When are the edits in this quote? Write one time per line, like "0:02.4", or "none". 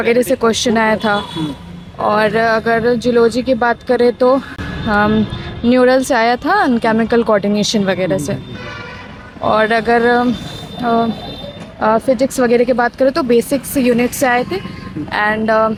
none